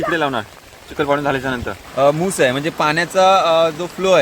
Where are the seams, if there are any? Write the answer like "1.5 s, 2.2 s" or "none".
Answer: 1.8 s